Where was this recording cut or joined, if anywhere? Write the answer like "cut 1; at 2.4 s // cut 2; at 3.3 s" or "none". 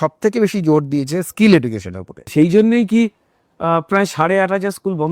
cut 1; at 2.2 s